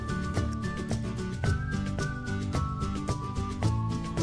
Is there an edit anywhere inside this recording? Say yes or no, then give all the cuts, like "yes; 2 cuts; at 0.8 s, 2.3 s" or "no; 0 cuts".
no; 0 cuts